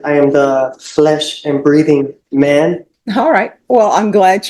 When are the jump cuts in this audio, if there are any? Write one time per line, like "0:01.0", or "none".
0:02.9